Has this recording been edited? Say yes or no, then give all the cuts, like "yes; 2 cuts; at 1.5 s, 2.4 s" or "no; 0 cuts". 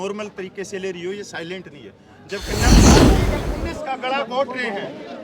yes; 2 cuts; at 2.6 s, 3.4 s